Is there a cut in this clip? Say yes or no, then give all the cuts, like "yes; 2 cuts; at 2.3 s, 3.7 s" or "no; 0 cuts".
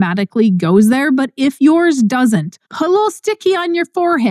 yes; 1 cut; at 2.6 s